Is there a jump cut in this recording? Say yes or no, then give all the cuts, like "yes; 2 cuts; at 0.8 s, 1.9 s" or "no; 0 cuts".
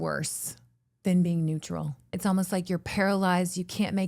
yes; 1 cut; at 2.1 s